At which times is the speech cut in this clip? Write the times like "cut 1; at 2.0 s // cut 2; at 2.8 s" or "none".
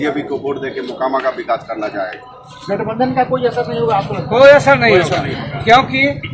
none